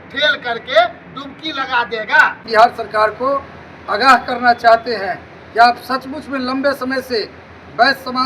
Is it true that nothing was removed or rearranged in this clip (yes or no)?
no